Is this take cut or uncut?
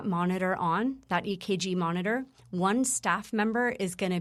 uncut